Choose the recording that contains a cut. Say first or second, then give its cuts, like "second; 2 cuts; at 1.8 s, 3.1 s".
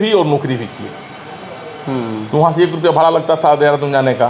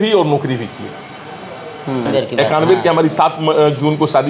second; 1 cut; at 2.1 s